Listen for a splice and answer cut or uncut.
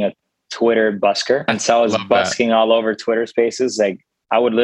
cut